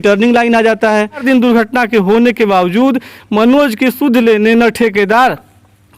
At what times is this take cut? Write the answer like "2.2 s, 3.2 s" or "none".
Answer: 1.2 s